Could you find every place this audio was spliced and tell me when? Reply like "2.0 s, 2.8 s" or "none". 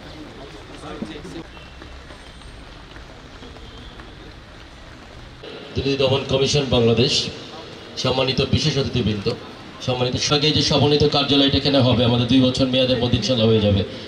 none